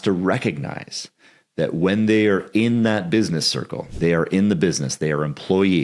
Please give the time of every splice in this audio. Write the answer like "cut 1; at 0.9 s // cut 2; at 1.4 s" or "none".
cut 1; at 3.8 s

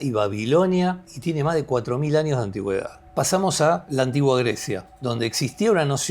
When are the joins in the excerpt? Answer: cut 1; at 1.1 s // cut 2; at 3.0 s // cut 3; at 3.9 s // cut 4; at 4.9 s

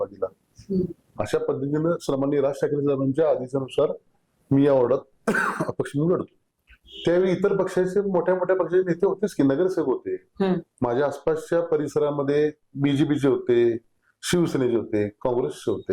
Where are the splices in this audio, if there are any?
cut 1; at 6.3 s

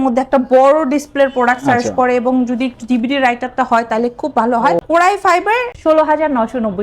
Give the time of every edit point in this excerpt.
cut 1; at 4.8 s // cut 2; at 5.7 s

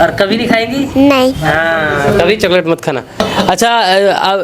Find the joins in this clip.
none

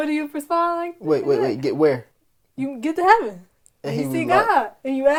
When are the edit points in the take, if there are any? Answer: none

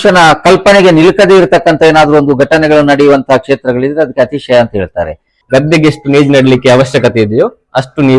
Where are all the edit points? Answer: cut 1; at 5.4 s

